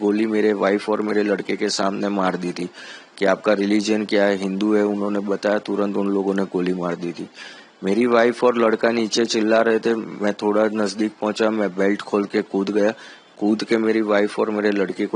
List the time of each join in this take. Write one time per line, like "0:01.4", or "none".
none